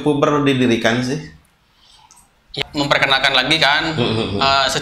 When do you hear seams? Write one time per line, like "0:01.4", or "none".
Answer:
0:02.5

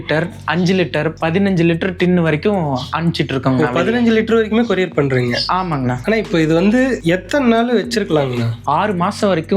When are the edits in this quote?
0:05.9
0:07.0
0:08.6

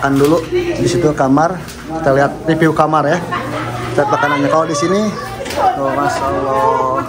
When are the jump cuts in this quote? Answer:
none

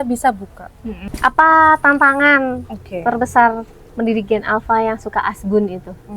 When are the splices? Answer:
0:01.0

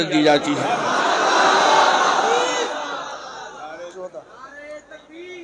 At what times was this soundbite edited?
none

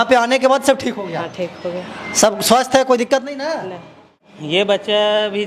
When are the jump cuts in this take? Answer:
0:04.6

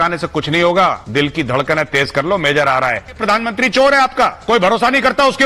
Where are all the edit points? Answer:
0:01.0
0:03.2
0:04.4

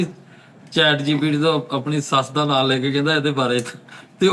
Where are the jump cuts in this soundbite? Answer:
none

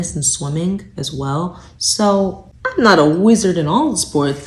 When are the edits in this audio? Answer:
0:02.5

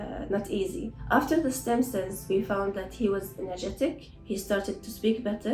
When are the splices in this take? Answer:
0:01.0
0:04.1

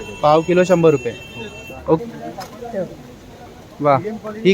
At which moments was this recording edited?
0:02.0

